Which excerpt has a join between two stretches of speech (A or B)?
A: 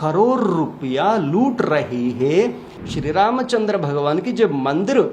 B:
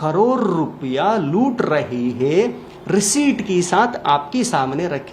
A